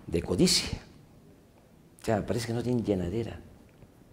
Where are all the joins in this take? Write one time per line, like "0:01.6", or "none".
none